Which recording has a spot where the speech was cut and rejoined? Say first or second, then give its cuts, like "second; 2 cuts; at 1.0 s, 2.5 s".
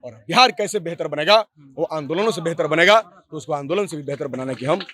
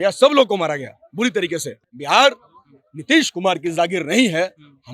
second; 1 cut; at 1.7 s